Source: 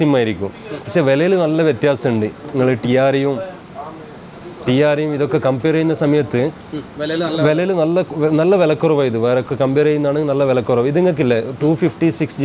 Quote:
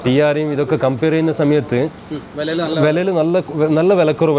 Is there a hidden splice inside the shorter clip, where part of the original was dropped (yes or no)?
no